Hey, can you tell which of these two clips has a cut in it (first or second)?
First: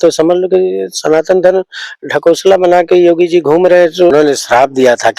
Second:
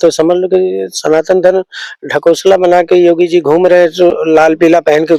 first